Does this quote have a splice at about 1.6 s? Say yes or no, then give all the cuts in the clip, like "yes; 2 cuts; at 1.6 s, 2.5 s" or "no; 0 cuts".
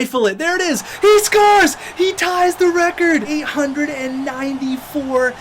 no; 1 cut; at 3.3 s